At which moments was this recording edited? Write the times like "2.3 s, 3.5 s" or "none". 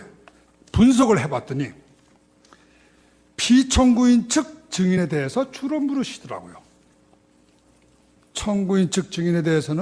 5.6 s